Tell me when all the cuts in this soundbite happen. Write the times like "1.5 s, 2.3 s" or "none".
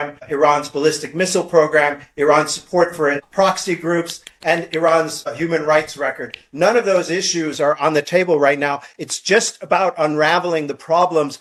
none